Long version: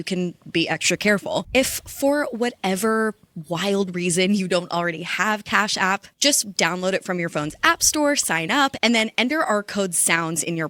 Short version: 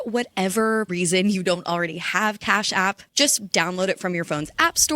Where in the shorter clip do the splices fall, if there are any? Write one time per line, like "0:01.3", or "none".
0:00.9